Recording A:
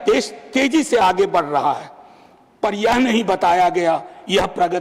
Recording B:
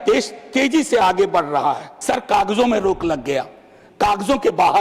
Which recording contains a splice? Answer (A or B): B